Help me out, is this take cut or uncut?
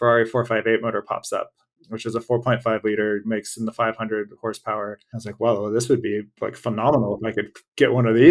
cut